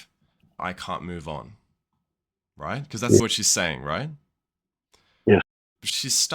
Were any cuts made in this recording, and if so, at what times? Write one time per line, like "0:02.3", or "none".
0:05.4